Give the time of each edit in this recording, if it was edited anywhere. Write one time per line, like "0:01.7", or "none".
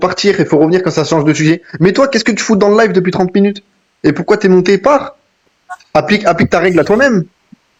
none